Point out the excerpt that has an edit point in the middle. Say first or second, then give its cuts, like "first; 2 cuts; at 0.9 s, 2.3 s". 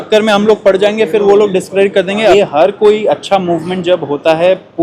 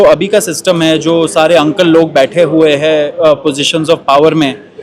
first; 1 cut; at 2.3 s